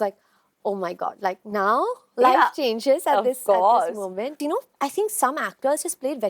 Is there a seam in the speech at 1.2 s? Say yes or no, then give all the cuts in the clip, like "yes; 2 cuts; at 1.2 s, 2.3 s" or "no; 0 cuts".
no; 1 cut; at 4.4 s